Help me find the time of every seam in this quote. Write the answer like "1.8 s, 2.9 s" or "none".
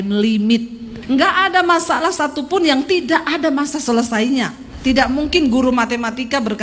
0.9 s, 4.7 s